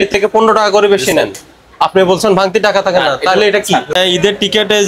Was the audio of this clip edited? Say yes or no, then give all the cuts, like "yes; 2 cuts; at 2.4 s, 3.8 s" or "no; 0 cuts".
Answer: yes; 1 cut; at 3.9 s